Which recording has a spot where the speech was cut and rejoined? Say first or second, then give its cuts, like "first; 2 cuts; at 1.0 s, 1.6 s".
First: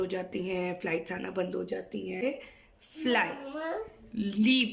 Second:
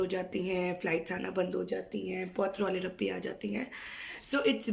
first; 1 cut; at 2.2 s